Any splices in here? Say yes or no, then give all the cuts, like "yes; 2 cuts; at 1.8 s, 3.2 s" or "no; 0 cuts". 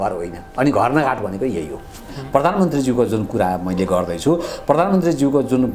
yes; 1 cut; at 2.1 s